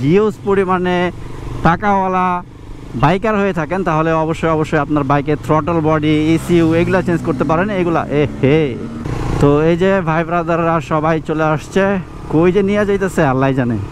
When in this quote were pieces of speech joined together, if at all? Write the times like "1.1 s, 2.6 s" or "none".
none